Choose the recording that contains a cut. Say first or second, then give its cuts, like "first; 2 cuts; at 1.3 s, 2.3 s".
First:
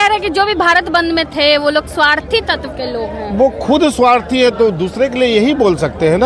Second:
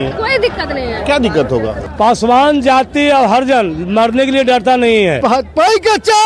second; 2 cuts; at 1.8 s, 5.2 s